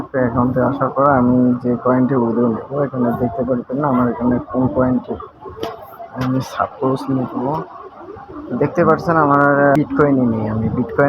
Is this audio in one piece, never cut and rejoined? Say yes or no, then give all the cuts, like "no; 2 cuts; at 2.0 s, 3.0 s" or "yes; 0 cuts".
no; 1 cut; at 9.8 s